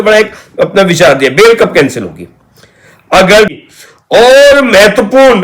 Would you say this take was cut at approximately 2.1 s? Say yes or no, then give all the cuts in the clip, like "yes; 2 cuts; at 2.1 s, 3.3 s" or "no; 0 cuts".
no; 1 cut; at 3.5 s